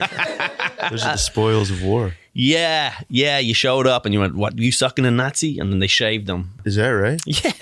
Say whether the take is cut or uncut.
cut